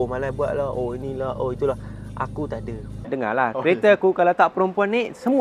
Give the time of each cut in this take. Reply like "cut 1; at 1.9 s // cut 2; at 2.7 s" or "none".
cut 1; at 3.0 s